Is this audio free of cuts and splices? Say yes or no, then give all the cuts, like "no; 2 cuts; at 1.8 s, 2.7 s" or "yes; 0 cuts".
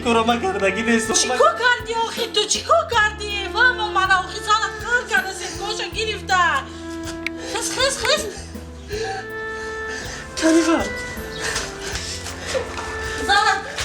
yes; 0 cuts